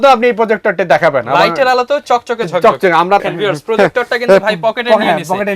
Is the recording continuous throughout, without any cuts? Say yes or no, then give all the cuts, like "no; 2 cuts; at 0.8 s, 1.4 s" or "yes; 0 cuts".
no; 1 cut; at 3.2 s